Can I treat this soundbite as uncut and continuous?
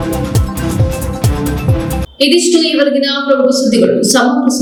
yes; 0 cuts

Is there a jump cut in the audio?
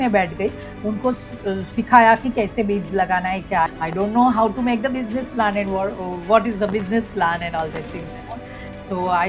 yes; 1 cut; at 3.7 s

